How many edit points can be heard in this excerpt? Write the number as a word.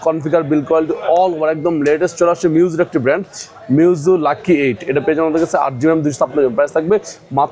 zero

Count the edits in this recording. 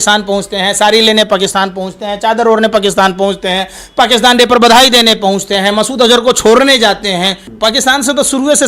one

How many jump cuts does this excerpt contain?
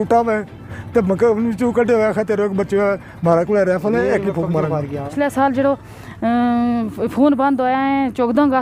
one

